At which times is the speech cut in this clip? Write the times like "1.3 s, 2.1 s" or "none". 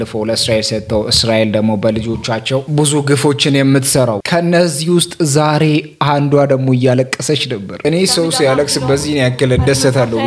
none